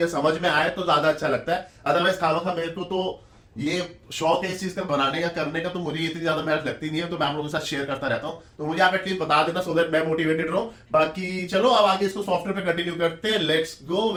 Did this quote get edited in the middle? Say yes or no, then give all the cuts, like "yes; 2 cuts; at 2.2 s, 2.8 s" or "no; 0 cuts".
no; 0 cuts